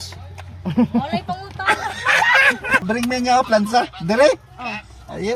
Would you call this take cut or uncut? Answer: cut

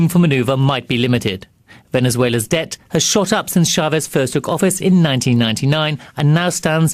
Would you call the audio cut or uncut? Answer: cut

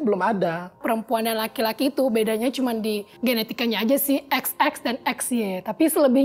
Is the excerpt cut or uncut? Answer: cut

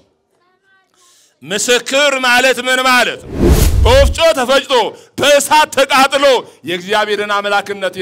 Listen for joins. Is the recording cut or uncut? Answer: cut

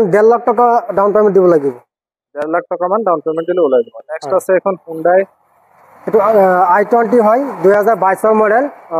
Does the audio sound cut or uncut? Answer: uncut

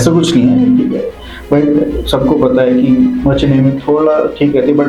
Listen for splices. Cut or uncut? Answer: uncut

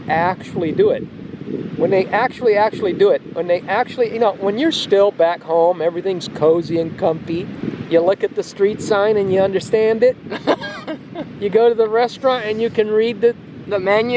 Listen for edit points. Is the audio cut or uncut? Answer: cut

